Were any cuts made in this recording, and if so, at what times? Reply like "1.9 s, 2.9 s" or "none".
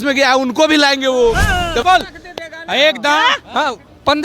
1.8 s